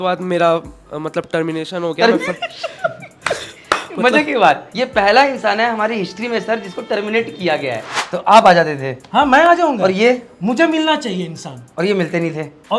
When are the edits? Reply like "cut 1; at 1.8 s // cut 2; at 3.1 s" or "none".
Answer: cut 1; at 4.7 s // cut 2; at 7.9 s